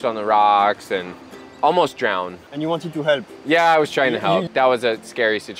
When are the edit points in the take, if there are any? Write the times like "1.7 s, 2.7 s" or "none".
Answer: 2.4 s, 4.5 s